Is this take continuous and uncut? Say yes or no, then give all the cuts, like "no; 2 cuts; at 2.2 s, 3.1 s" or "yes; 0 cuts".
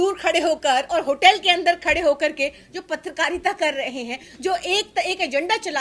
yes; 0 cuts